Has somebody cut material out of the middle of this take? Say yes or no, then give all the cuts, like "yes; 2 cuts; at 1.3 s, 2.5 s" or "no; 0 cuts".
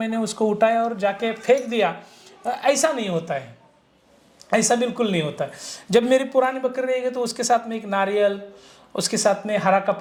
no; 0 cuts